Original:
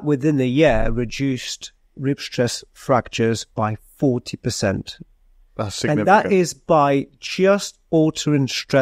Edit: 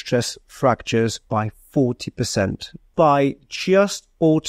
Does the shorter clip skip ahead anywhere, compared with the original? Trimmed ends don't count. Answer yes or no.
yes